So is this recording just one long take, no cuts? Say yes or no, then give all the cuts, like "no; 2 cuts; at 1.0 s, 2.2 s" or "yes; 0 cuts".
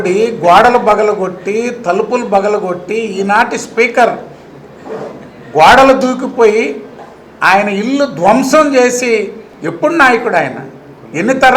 no; 1 cut; at 9.5 s